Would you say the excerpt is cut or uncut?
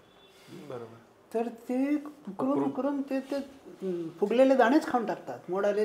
uncut